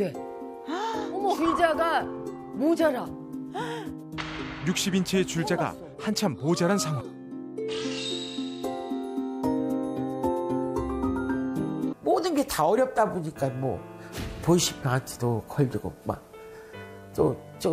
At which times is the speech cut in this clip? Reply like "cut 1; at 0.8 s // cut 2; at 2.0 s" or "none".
cut 1; at 12.0 s